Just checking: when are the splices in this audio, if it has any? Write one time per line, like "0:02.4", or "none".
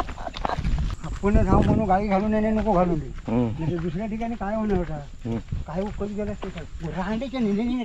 0:00.9